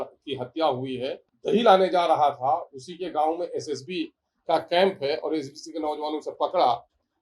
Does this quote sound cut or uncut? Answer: cut